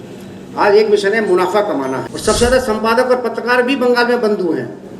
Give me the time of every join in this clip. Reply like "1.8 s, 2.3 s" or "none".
2.1 s